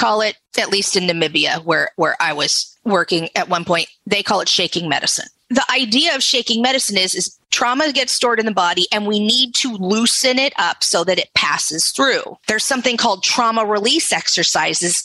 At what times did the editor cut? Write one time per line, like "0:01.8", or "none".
none